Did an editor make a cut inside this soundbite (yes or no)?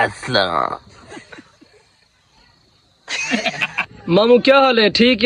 no